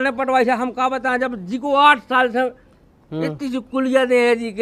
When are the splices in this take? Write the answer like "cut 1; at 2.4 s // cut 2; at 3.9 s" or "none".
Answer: none